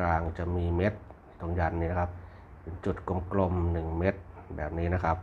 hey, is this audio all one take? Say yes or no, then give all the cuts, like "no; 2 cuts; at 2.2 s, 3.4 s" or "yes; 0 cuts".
yes; 0 cuts